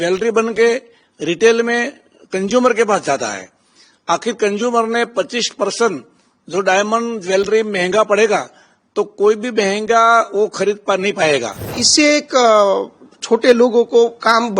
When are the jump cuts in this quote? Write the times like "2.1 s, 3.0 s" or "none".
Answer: 11.8 s